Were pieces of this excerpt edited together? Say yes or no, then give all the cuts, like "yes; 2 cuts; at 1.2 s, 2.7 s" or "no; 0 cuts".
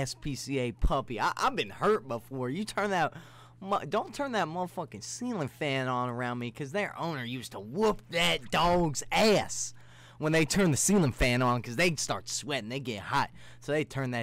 no; 0 cuts